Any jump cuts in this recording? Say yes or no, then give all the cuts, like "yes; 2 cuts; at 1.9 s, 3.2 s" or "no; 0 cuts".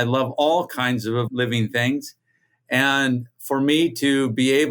yes; 1 cut; at 1.3 s